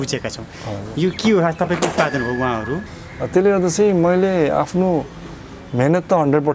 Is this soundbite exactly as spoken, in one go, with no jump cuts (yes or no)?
no